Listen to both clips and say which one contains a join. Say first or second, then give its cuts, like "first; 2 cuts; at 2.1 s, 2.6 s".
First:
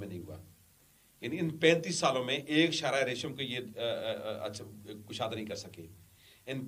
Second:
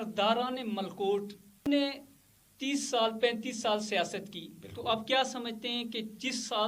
second; 1 cut; at 1.6 s